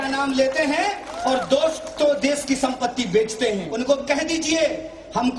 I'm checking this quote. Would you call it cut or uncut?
cut